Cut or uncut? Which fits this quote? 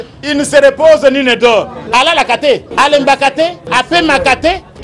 uncut